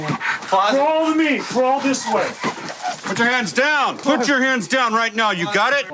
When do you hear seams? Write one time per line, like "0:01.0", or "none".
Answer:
none